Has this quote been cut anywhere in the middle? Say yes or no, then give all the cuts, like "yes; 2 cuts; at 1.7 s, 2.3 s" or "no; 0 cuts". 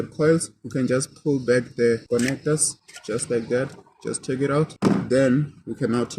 no; 0 cuts